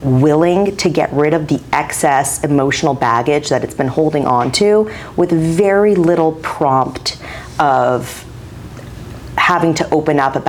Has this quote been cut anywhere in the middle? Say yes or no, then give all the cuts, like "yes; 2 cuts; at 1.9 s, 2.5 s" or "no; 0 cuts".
no; 0 cuts